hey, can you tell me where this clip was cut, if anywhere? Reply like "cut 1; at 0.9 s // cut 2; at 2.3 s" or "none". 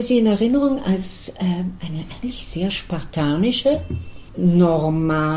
none

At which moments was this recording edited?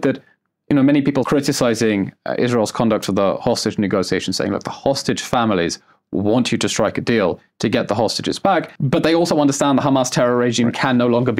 cut 1; at 1.3 s // cut 2; at 8.7 s

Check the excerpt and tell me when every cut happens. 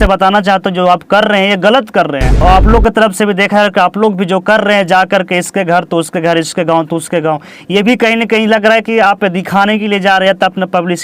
cut 1; at 2.4 s

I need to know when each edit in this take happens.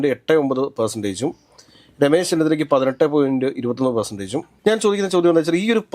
cut 1; at 4.5 s

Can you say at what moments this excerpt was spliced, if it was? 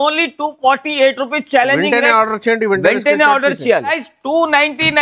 cut 1; at 4.0 s

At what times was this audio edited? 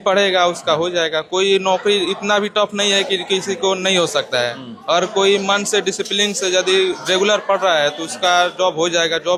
none

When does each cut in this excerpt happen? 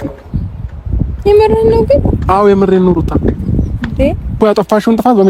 none

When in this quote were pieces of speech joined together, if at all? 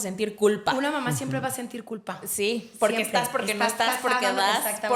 none

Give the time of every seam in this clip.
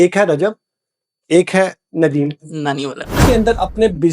cut 1; at 3.2 s

